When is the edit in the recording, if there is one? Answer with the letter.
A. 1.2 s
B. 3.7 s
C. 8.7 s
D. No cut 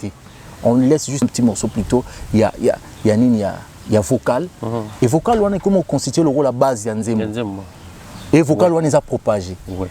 A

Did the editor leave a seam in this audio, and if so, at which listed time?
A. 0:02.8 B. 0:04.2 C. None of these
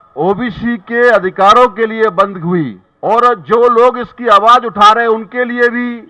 A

